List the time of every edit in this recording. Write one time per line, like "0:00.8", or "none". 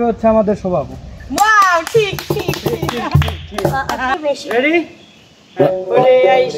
0:04.1

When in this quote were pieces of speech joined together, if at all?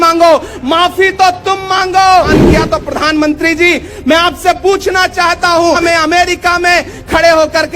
0:02.3
0:05.8

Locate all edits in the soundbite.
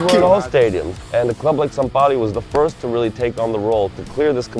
0:00.9

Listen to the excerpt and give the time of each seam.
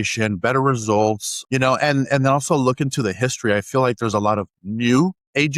0:01.3

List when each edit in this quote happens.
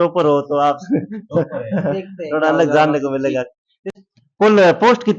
0:03.9

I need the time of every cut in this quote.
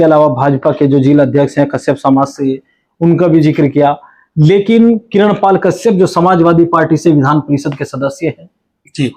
none

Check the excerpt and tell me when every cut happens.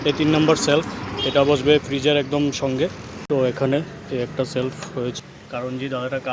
0:03.1
0:05.2

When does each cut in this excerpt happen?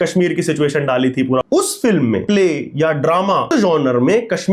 0:01.4
0:02.2
0:03.5

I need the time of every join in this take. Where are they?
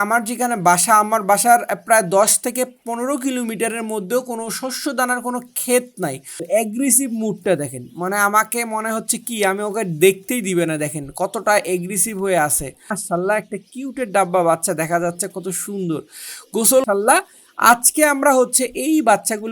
0:06.4
0:13.0
0:16.8

